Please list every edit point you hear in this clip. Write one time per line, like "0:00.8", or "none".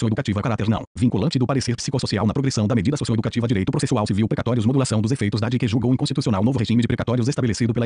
0:03.6